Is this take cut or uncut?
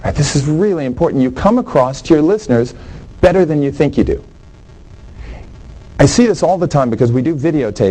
uncut